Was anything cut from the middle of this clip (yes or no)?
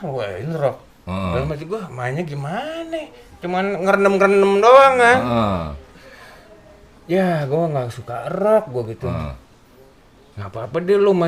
no